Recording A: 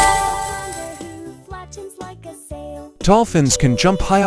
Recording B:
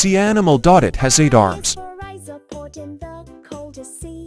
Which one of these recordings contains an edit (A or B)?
A